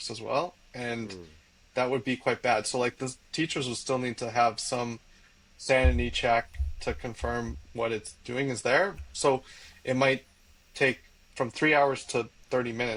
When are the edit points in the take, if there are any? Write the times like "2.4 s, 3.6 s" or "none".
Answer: none